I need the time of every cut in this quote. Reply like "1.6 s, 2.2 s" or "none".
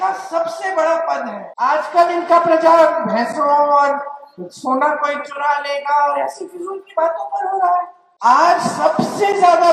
1.4 s, 8.0 s